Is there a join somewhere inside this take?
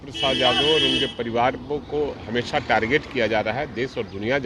no; 0 cuts

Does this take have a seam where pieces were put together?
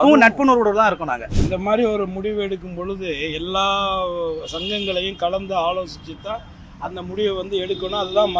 yes; 1 cut; at 1.3 s

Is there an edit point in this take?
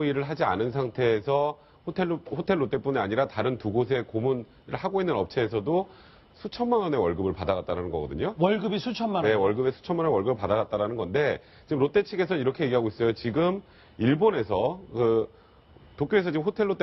yes; 1 cut; at 7.3 s

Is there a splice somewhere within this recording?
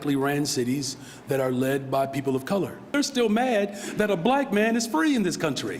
yes; 1 cut; at 2.9 s

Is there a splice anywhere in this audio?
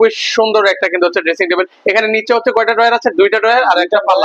no; 0 cuts

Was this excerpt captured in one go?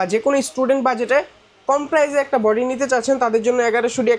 yes; 0 cuts

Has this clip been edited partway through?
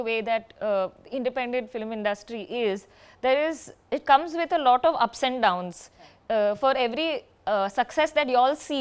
no; 0 cuts

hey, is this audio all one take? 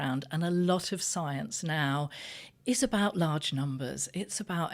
yes; 0 cuts

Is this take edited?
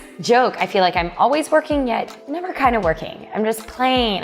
no; 0 cuts

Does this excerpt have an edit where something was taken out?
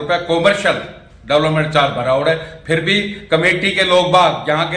no; 0 cuts

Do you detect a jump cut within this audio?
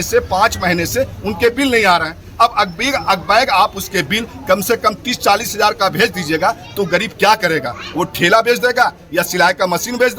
no; 0 cuts

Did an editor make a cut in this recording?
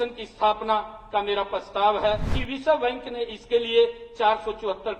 yes; 1 cut; at 2.3 s

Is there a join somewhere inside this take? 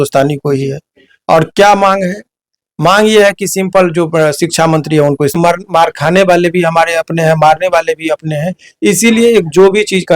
yes; 1 cut; at 5.4 s

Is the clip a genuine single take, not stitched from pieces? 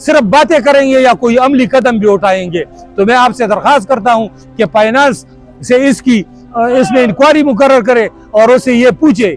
yes; 0 cuts

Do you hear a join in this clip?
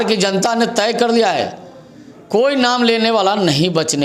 no; 0 cuts

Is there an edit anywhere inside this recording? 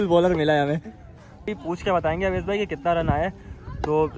yes; 1 cut; at 1.5 s

